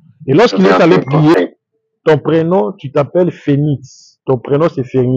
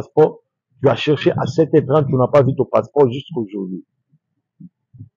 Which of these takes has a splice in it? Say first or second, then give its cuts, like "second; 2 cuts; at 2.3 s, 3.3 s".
first; 1 cut; at 1.3 s